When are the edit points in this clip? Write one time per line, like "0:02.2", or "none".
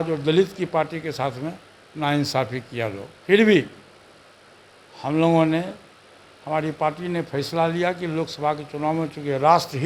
none